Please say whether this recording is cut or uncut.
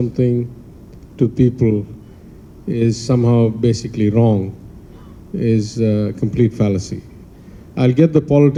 uncut